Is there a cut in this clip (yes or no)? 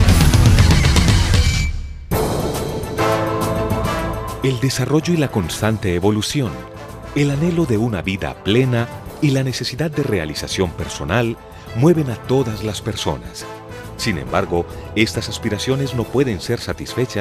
yes